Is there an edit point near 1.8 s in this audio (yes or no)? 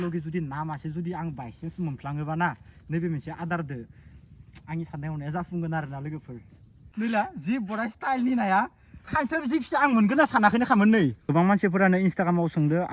no